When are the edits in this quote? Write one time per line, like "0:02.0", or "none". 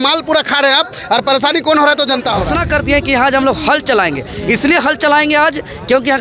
0:02.5